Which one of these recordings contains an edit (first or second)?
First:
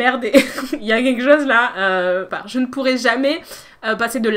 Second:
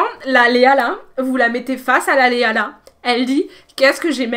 first